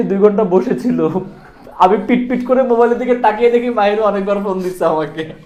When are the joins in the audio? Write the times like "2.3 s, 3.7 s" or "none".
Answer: none

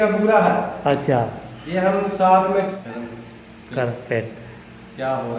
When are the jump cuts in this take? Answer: 2.7 s

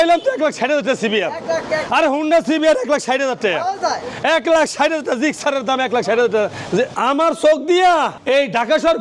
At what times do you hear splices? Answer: 6.9 s

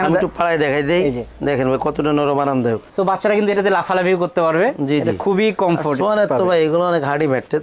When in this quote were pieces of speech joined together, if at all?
none

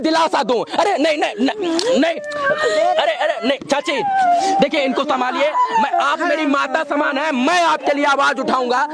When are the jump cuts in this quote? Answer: none

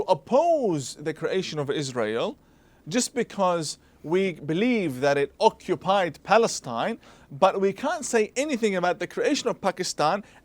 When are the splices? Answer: none

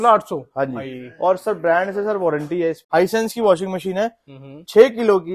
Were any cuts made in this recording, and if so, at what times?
2.9 s

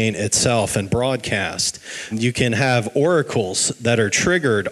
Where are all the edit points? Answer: 2.1 s

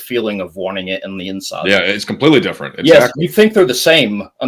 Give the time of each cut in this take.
none

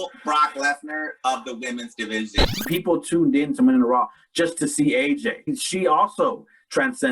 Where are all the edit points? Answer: 2.5 s, 5.6 s

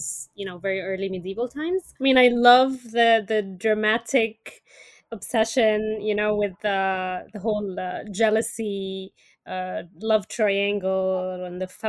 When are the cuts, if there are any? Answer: 1.9 s

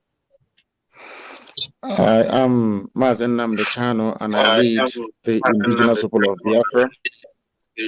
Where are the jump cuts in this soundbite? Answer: 2.3 s

